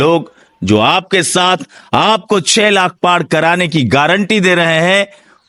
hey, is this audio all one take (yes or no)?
yes